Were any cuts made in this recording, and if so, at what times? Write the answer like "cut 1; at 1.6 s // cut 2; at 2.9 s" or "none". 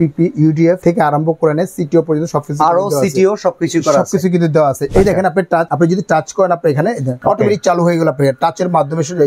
cut 1; at 0.8 s // cut 2; at 4.8 s // cut 3; at 5.7 s // cut 4; at 7.1 s